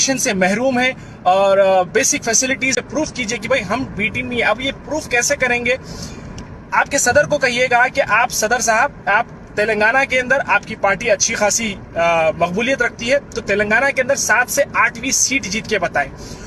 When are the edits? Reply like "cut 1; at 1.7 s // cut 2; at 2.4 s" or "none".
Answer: cut 1; at 2.8 s